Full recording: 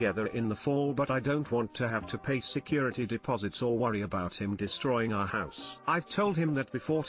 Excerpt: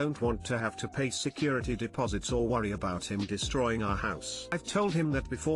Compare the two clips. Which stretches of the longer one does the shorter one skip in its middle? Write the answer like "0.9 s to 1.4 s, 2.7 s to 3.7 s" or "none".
5.8 s to 6.0 s